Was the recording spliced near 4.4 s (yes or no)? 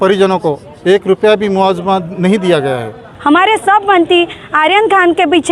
no